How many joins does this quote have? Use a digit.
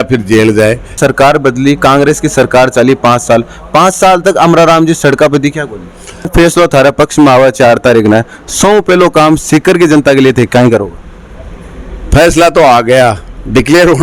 2